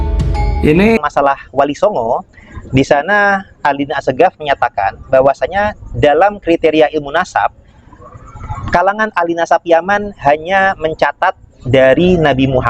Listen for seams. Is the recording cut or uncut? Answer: cut